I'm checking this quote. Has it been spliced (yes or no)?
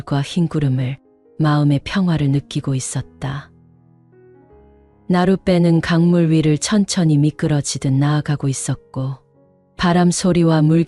no